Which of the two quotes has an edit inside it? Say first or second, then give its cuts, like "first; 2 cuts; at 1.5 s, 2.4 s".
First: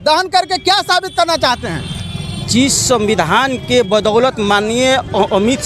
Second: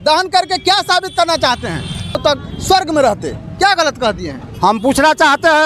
second; 1 cut; at 2.2 s